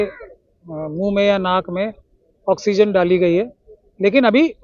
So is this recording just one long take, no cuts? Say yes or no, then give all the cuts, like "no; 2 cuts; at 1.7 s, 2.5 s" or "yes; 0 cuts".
yes; 0 cuts